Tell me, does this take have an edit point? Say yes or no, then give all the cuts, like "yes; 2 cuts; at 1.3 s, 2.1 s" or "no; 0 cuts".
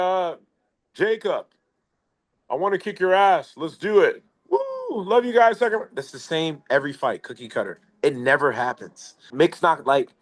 yes; 1 cut; at 9.2 s